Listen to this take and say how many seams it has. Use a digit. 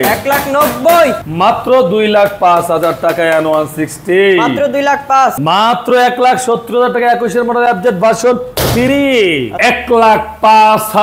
3